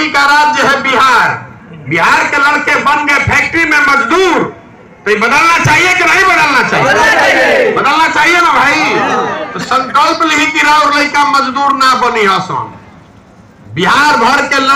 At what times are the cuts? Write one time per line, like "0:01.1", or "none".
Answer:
none